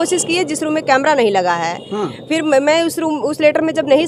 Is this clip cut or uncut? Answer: uncut